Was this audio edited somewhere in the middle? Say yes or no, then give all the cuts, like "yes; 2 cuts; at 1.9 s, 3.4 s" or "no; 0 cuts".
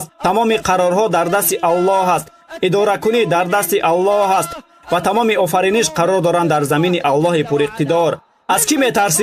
no; 0 cuts